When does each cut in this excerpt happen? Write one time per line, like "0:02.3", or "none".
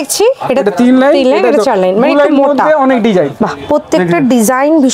0:03.4